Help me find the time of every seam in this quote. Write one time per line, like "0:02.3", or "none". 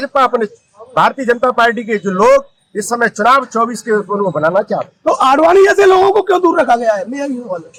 none